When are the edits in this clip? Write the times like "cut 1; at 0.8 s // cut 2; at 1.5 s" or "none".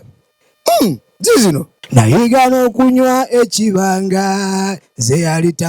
cut 1; at 1.8 s